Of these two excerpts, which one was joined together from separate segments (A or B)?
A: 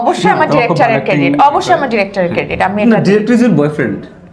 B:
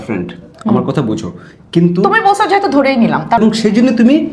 B